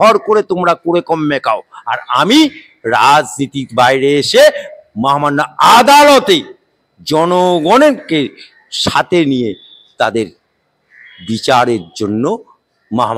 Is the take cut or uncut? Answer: uncut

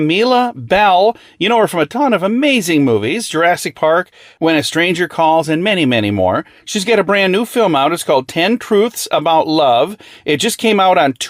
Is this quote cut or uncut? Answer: uncut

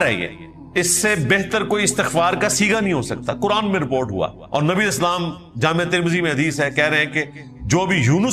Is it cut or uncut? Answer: cut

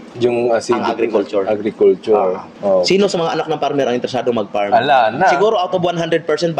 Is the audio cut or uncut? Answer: cut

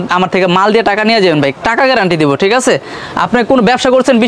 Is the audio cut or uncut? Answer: uncut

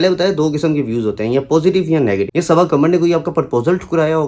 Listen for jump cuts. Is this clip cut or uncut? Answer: cut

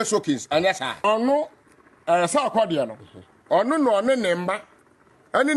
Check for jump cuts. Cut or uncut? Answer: cut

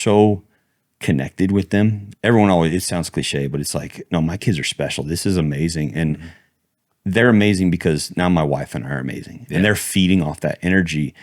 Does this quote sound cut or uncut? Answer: cut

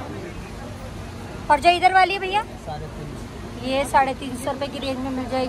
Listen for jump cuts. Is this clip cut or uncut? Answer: uncut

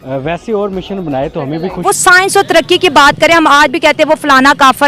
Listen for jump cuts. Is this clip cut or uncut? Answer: cut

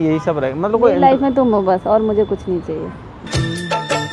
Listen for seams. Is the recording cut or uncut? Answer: uncut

